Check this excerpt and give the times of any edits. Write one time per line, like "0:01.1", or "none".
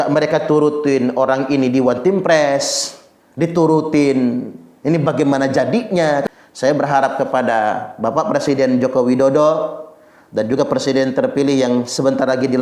0:06.2